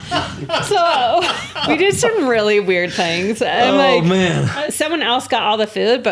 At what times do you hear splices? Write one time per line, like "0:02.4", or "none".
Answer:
0:01.5
0:04.5